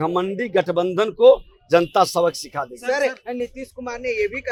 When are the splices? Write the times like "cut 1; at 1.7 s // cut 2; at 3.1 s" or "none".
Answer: none